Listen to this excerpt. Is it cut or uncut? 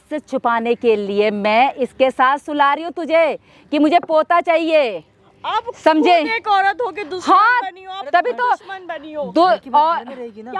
uncut